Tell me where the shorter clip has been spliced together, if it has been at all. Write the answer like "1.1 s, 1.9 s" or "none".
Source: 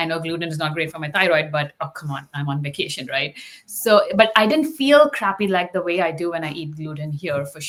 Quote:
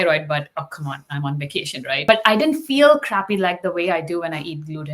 2.1 s